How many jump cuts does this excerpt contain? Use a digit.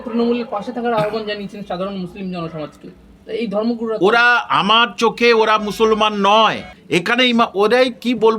1